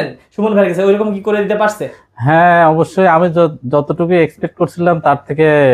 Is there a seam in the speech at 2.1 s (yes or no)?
no